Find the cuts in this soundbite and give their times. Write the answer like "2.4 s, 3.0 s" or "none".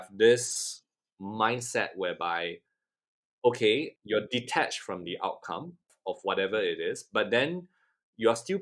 none